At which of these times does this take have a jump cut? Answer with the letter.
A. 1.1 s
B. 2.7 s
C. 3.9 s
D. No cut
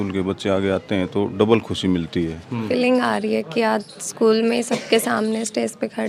B